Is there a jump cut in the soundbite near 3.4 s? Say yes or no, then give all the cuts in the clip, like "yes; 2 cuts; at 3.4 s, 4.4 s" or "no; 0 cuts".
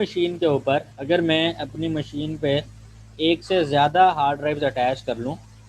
no; 1 cut; at 0.9 s